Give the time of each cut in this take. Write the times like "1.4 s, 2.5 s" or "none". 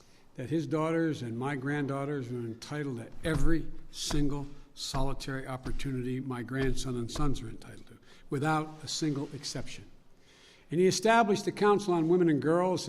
2.2 s

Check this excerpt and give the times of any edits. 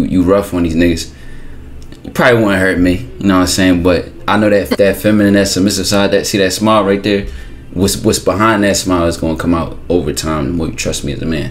none

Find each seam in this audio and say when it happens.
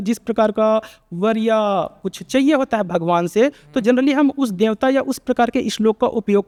none

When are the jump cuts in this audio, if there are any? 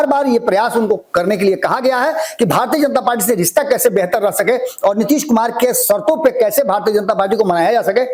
none

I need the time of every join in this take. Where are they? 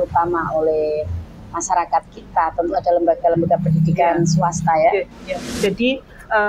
5.5 s

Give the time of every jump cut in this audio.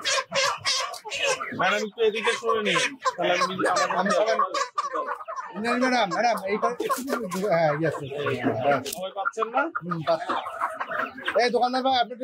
none

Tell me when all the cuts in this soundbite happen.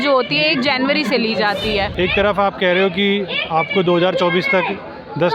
1.9 s

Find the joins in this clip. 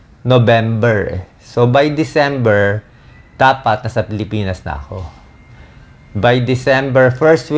none

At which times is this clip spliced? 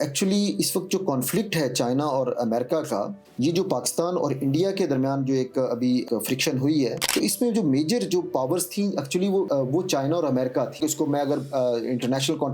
7.0 s, 9.5 s, 10.8 s

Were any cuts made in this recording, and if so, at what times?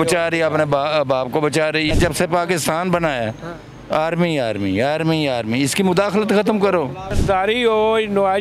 1.9 s, 7.1 s

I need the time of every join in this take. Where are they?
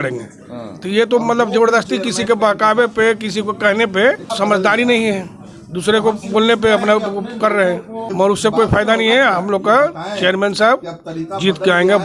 4.3 s, 8.1 s

